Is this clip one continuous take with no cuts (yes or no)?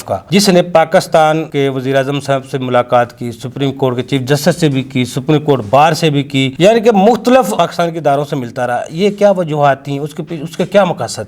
yes